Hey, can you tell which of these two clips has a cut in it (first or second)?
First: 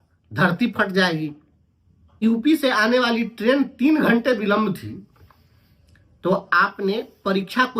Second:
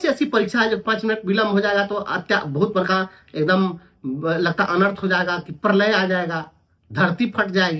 first